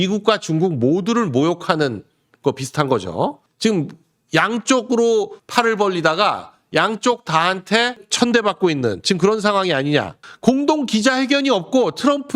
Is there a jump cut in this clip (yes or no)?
yes